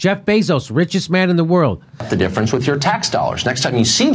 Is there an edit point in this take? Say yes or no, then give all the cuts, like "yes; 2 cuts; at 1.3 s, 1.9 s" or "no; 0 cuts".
yes; 1 cut; at 2.1 s